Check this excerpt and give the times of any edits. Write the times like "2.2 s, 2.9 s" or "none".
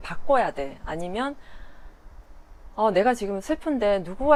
none